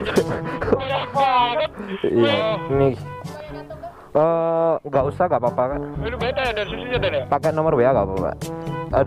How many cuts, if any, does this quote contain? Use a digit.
1